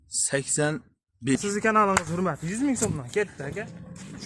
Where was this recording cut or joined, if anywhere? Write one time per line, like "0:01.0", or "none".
0:01.4